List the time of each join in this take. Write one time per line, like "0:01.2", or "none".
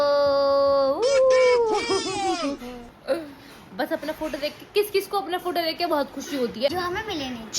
0:06.7

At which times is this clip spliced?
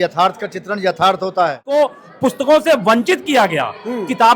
0:01.6

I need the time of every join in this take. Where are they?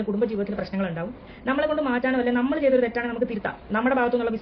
0:01.3

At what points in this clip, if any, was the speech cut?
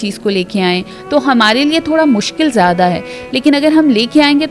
0:00.9

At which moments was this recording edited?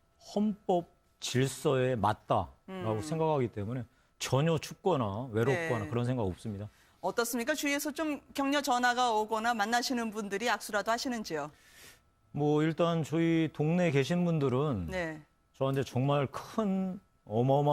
0:05.2

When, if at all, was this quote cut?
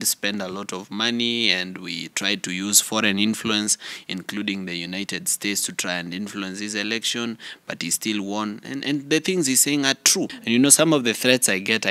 0:10.4

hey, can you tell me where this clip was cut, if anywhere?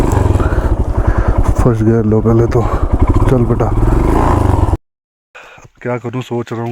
0:04.8

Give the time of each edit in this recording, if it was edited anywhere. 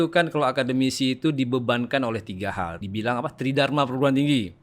0:02.8

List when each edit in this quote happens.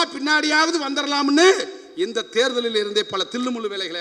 none

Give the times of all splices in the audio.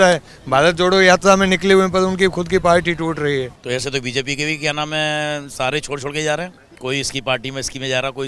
0:03.6
0:06.6

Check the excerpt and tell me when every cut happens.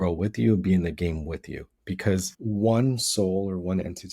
0:02.3

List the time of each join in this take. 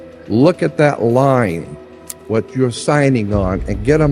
none

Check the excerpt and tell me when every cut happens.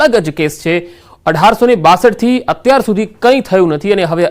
0:01.4

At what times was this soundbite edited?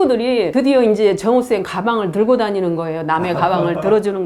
none

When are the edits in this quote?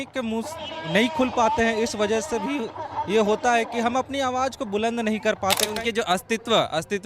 0:05.7

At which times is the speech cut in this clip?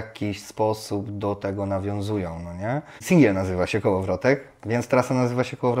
0:03.0

